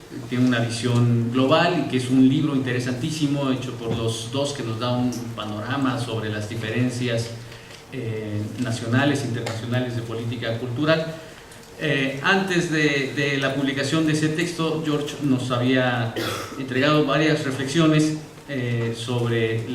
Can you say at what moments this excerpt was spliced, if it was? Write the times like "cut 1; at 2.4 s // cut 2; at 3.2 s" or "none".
cut 1; at 12.8 s